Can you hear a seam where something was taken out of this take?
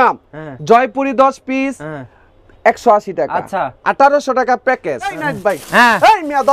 yes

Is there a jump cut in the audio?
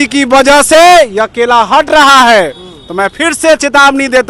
no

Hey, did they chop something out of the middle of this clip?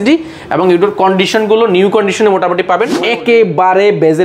yes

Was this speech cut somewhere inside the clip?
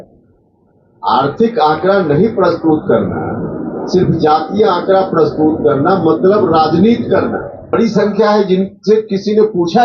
yes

